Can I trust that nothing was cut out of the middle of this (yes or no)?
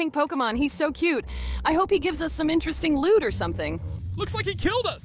yes